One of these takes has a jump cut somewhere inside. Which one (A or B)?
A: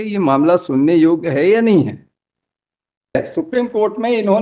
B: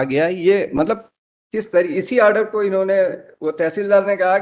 A